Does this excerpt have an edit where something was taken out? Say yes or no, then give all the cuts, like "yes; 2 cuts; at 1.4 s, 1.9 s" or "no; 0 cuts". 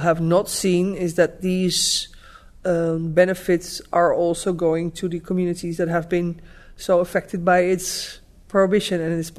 no; 0 cuts